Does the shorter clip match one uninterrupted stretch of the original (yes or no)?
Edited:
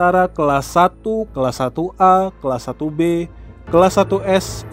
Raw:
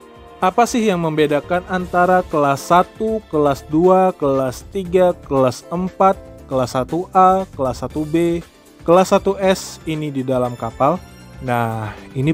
no